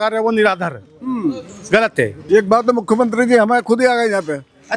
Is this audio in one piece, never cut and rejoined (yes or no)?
no